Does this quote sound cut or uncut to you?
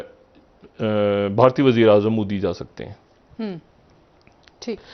uncut